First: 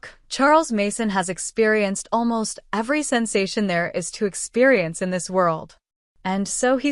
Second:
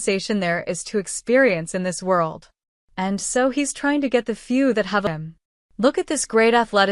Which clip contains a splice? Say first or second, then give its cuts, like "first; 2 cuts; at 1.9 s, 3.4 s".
second; 1 cut; at 5.0 s